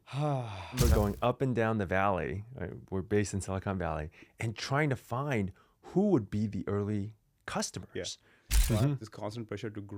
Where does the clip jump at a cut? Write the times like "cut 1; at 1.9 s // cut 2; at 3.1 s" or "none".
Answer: cut 1; at 0.8 s // cut 2; at 8.3 s